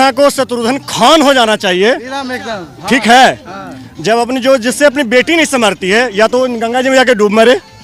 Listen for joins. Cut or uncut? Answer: uncut